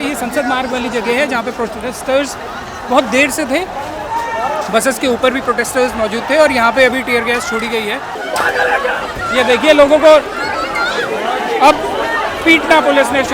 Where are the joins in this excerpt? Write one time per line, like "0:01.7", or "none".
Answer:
0:08.1